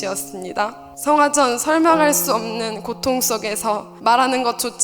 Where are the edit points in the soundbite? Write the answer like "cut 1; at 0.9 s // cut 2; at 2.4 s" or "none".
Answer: cut 1; at 0.9 s // cut 2; at 3.9 s